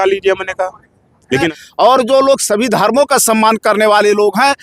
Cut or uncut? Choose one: cut